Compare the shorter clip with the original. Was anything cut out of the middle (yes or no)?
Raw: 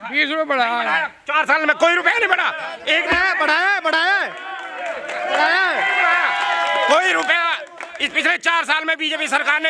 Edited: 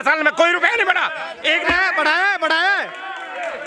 no